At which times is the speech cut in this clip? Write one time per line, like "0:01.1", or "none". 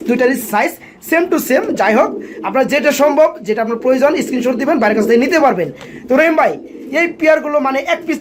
none